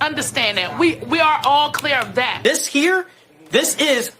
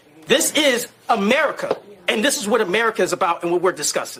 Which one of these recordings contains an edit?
first; 1 cut; at 2.3 s

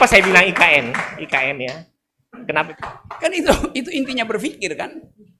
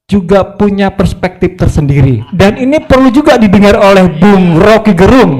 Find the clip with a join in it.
first; 1 cut; at 2.7 s

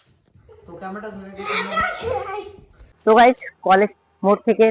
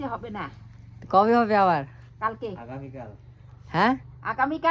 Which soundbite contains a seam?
first; 1 cut; at 3.0 s

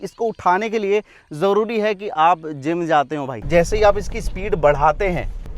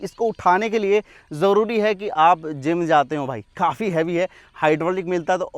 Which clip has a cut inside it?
first; 1 cut; at 3.3 s

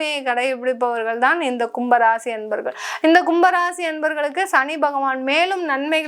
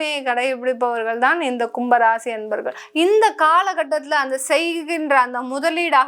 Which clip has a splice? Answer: second; 1 cut; at 2.8 s

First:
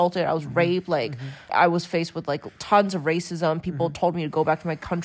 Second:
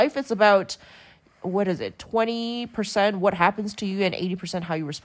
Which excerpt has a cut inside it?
first; 1 cut; at 1.5 s

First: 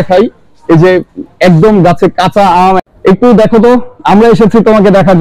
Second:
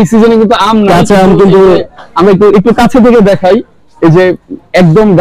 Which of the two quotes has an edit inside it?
first; 1 cut; at 2.8 s

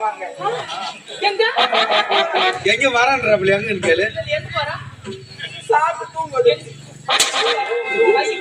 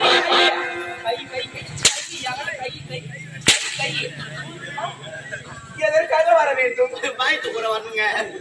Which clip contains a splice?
first; 1 cut; at 2.6 s

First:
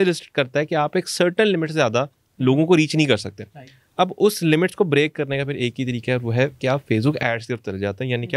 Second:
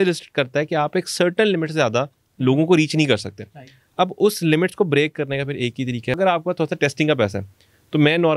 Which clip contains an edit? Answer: second; 1 cut; at 6.2 s

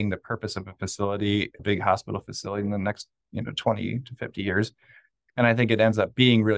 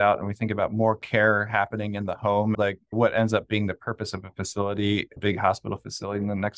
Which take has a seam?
second; 1 cut; at 2.5 s

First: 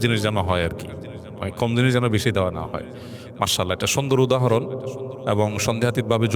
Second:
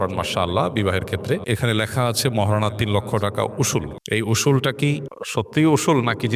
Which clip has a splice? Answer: second; 3 cuts; at 1.4 s, 4.0 s, 5.2 s

